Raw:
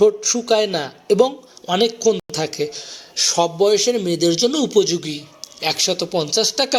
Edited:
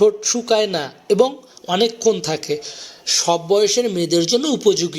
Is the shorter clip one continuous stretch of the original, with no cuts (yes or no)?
no